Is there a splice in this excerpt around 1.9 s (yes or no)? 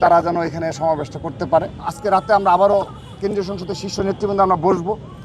yes